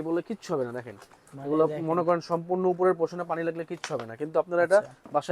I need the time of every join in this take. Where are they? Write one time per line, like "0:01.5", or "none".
none